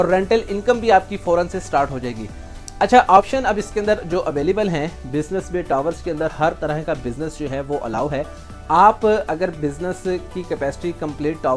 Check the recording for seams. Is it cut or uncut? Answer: uncut